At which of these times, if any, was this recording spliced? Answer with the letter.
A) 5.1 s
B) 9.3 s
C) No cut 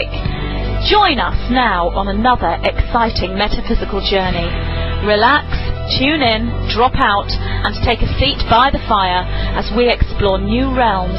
C